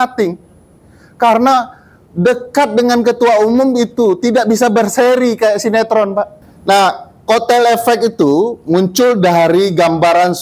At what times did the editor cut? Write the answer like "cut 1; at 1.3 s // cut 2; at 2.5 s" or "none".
cut 1; at 6.5 s